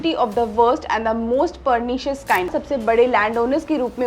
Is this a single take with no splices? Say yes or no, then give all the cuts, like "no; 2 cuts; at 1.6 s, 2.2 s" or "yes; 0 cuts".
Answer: no; 1 cut; at 2.6 s